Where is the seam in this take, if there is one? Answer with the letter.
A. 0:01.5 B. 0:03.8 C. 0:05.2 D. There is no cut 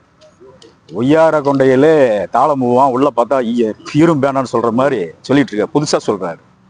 D